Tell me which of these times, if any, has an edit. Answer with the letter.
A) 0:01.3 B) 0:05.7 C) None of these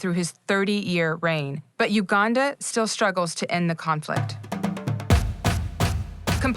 B